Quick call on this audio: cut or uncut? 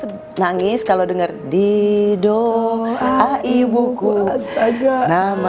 uncut